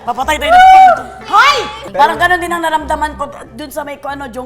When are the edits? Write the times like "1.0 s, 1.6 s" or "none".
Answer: 1.8 s